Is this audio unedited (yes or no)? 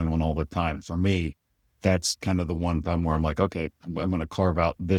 yes